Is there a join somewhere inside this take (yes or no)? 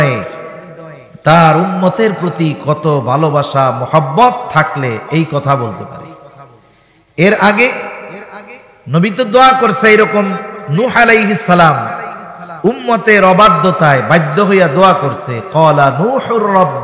no